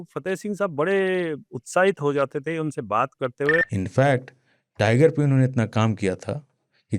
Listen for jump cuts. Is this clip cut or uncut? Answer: cut